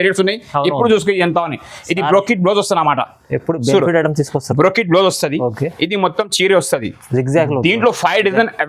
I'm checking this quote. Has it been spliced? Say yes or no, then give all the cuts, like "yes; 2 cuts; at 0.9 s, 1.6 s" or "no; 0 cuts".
no; 0 cuts